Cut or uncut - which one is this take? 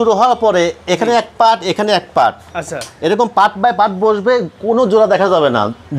uncut